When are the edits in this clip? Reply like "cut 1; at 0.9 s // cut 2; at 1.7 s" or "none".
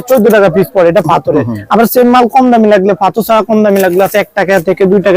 none